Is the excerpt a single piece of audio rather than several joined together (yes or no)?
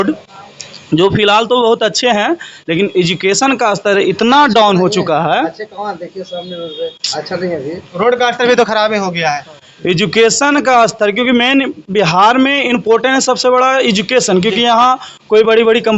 yes